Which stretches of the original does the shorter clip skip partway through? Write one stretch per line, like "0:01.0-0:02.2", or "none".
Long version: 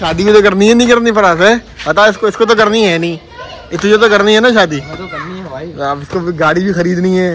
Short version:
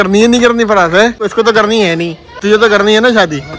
0:01.7-0:02.3
0:03.3-0:03.7